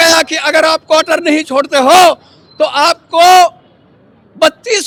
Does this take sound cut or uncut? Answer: uncut